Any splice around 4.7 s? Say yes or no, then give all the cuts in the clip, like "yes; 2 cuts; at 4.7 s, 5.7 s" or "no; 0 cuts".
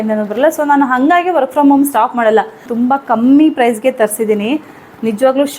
no; 1 cut; at 2.7 s